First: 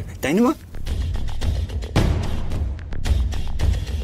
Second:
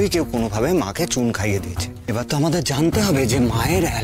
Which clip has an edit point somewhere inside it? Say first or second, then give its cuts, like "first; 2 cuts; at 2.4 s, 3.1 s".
second; 1 cut; at 1.9 s